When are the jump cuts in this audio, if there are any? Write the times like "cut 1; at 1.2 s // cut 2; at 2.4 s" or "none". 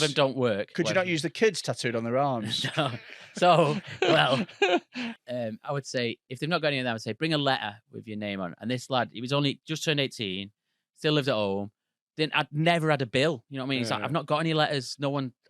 cut 1; at 5.1 s